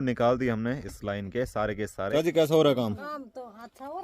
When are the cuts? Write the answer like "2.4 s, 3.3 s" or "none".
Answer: 2.1 s